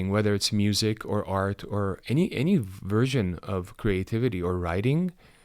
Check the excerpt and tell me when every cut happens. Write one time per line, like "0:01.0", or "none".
none

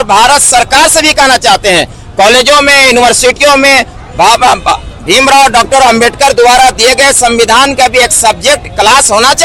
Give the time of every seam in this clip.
none

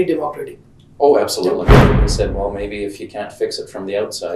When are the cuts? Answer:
0:01.7

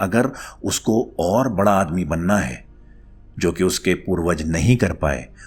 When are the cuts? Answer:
none

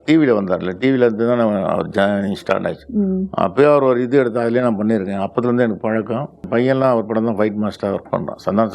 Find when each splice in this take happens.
0:06.4

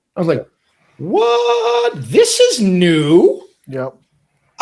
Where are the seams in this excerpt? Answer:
none

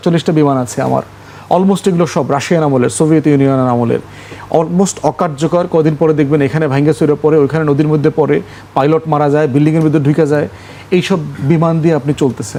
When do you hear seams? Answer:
none

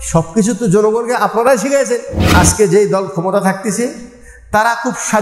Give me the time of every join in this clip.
0:02.2

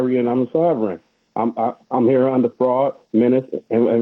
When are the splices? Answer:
none

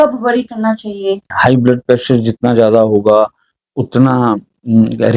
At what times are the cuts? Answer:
0:01.3

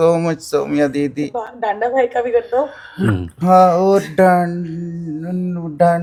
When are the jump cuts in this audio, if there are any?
none

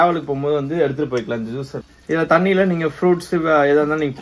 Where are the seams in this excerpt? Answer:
0:01.8

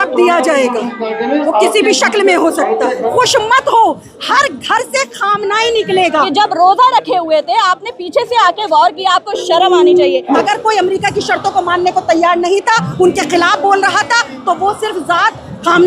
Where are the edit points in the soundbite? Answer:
0:03.1
0:06.3
0:10.4

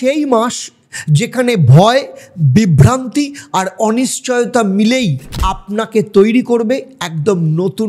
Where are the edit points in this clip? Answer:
none

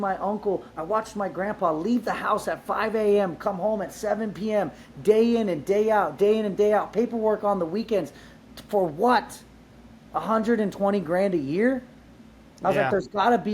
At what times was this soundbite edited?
none

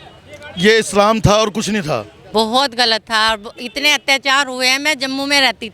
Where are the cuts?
0:02.2

